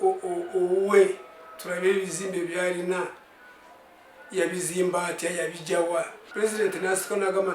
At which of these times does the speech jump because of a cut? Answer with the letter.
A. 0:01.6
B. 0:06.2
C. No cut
B